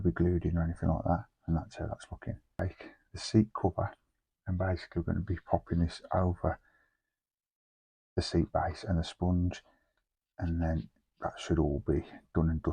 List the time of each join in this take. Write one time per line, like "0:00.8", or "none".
0:02.5